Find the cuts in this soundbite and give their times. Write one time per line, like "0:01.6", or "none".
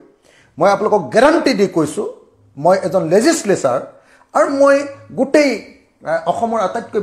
none